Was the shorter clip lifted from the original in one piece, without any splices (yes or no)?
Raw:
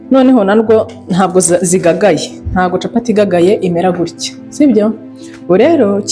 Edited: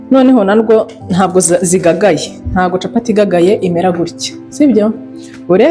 yes